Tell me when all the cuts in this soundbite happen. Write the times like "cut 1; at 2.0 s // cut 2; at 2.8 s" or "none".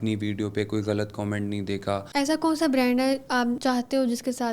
cut 1; at 2.1 s // cut 2; at 3.6 s